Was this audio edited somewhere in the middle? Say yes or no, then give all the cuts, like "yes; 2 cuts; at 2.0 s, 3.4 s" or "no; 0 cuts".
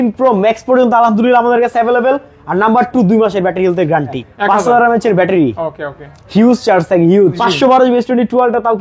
yes; 2 cuts; at 4.3 s, 7.4 s